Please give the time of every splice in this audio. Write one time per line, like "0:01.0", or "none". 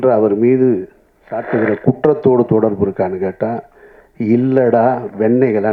none

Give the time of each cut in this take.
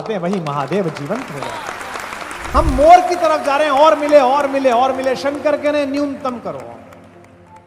0:02.5

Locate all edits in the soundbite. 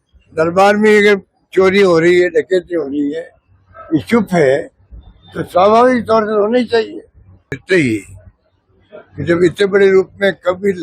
0:07.5

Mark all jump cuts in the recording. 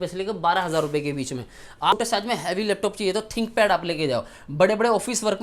0:01.9

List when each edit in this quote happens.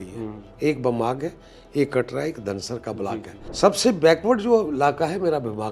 0:03.4

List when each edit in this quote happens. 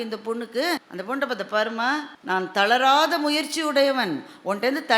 0:00.9
0:02.1

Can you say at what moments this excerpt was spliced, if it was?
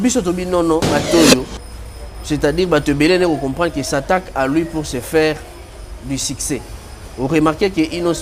0:01.1

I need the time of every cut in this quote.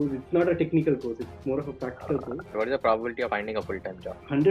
0:02.5
0:03.3

